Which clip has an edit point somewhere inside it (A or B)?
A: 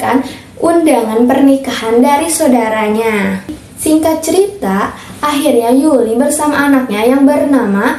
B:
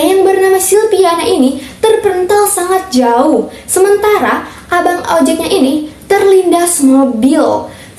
A